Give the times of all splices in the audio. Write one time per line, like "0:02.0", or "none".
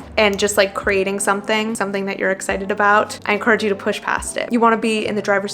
0:01.7
0:04.5